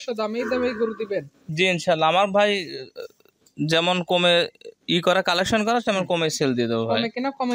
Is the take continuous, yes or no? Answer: yes